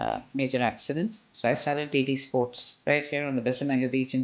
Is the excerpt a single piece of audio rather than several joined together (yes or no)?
no